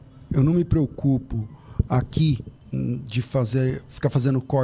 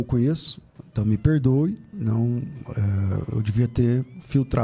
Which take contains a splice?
second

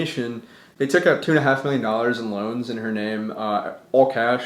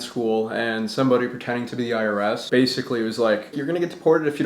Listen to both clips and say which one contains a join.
second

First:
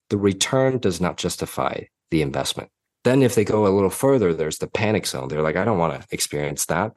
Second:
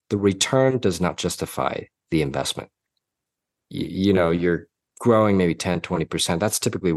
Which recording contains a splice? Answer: first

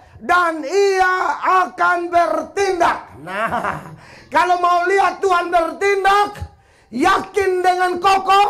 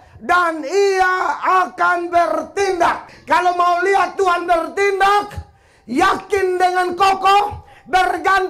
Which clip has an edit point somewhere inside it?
second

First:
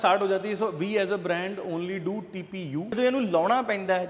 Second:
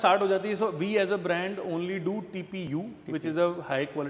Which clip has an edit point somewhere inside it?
first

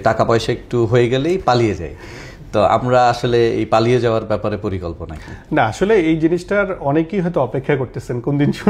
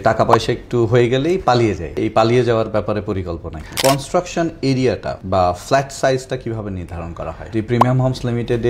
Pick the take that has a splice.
second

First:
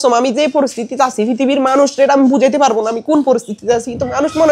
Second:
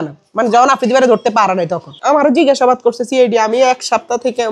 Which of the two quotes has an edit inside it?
second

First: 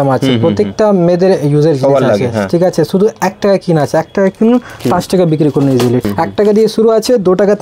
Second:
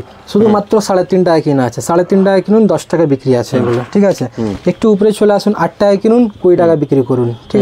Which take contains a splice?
first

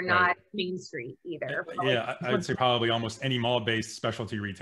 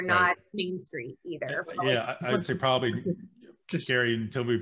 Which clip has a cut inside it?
first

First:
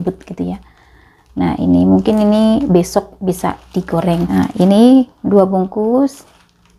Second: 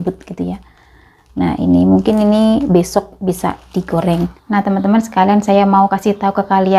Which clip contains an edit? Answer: second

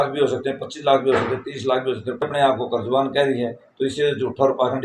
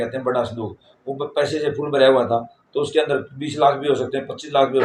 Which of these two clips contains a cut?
first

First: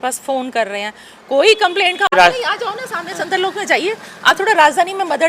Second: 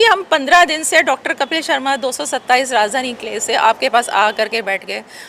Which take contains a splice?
first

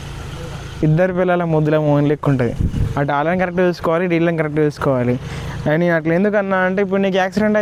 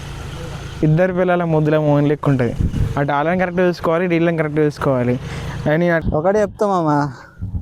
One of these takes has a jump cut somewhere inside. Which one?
second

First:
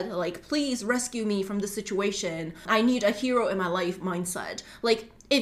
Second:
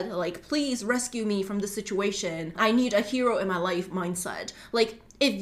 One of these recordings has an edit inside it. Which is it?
second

